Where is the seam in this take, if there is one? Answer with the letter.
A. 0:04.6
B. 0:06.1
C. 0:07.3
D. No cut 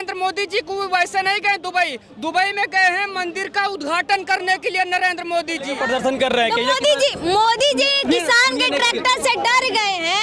B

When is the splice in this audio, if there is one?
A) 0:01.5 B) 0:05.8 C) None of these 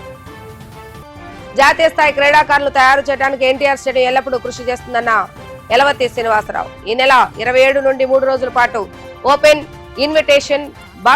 A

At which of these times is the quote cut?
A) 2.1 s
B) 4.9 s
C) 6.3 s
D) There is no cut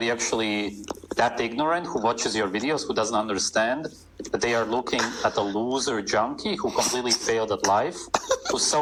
D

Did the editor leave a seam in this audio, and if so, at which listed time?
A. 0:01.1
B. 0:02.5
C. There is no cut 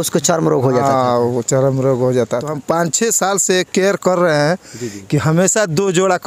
B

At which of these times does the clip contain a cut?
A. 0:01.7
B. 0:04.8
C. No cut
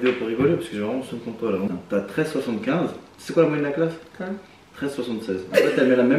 A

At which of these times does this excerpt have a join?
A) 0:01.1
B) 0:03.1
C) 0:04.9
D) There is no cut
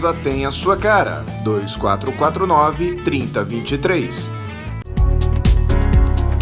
C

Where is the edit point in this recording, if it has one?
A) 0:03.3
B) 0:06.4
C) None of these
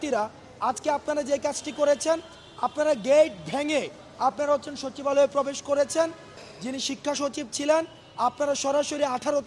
B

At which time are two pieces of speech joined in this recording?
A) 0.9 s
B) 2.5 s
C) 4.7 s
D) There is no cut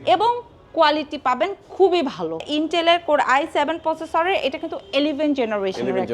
B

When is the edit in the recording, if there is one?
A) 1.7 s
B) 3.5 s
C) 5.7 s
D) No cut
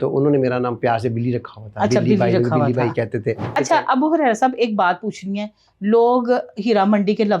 B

